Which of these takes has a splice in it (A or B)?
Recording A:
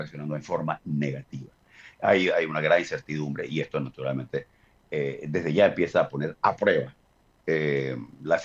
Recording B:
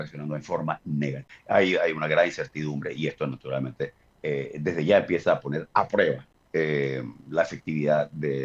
B